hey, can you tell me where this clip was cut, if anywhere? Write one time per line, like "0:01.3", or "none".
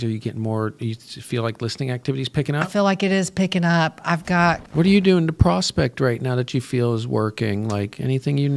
0:04.7